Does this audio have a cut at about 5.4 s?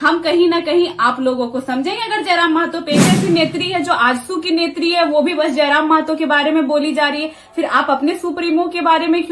no; 1 cut; at 3.1 s

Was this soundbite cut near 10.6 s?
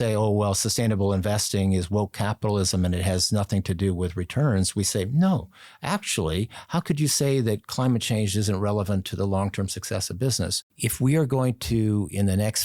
yes; 1 cut; at 10.6 s

